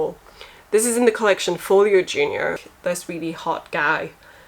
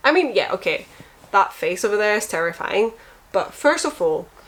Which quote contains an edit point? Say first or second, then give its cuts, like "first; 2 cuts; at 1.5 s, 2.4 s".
first; 1 cut; at 2.6 s